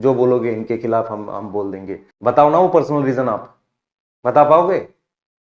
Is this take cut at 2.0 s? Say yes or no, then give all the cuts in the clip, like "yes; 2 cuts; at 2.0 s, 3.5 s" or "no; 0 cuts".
yes; 1 cut; at 2.0 s